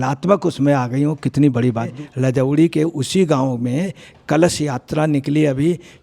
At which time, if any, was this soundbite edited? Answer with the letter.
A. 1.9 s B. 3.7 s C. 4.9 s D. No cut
A